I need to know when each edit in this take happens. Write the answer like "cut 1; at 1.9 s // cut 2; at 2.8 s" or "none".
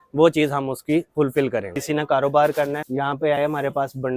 cut 1; at 1.7 s // cut 2; at 2.8 s